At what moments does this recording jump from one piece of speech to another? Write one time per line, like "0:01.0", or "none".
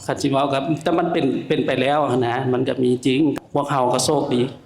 0:03.4